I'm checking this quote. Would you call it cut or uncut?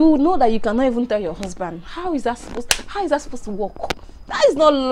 uncut